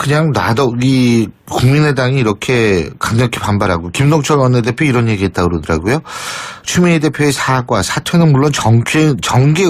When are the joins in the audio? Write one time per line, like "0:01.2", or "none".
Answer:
0:05.6